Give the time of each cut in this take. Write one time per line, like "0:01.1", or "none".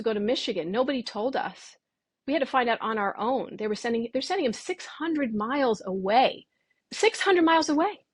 0:06.8